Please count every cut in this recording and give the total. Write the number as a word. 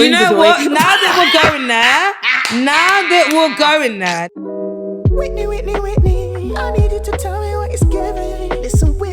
one